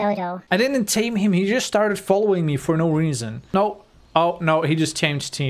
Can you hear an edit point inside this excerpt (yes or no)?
yes